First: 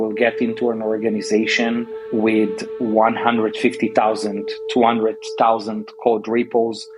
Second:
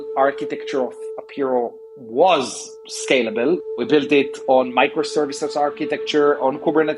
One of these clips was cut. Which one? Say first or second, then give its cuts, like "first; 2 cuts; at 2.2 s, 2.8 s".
second; 1 cut; at 3.6 s